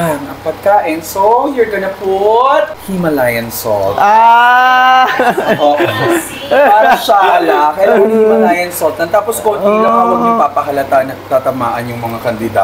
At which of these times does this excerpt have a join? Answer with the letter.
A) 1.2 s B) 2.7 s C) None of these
B